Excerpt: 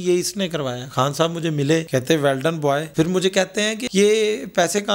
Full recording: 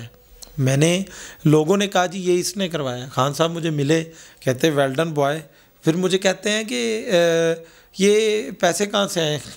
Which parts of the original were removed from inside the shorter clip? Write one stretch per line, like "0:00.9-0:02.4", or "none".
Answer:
0:04.1-0:04.4
0:05.4-0:05.8
0:06.7-0:07.9